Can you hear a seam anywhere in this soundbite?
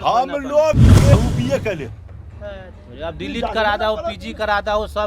yes; 1 cut; at 1.1 s

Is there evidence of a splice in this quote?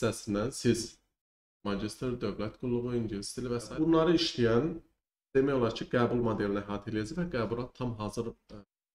yes; 1 cut; at 3.7 s

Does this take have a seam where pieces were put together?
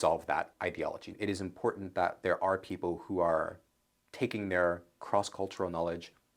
yes; 1 cut; at 1.1 s

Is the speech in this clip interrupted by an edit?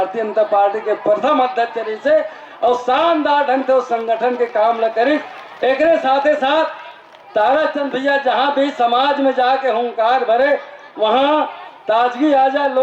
no; 0 cuts

